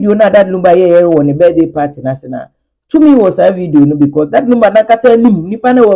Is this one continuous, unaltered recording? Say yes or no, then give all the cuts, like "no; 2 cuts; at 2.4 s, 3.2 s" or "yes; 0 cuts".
yes; 0 cuts